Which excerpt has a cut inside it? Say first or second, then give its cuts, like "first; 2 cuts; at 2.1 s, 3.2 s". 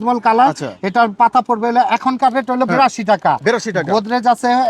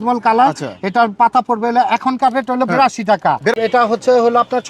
second; 1 cut; at 3.6 s